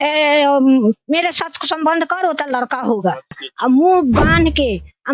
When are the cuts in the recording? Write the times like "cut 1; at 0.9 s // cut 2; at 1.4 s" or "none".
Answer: cut 1; at 3.3 s